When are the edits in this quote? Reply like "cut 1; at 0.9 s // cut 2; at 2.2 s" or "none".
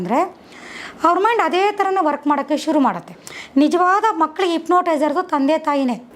cut 1; at 3.1 s